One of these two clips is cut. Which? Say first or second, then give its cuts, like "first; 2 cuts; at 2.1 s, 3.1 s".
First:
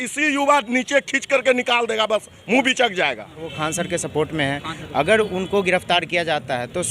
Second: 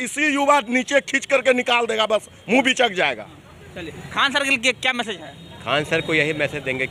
first; 1 cut; at 3.5 s